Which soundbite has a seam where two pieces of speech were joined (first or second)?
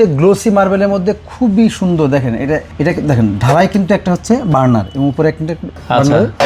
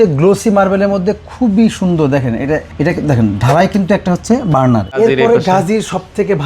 second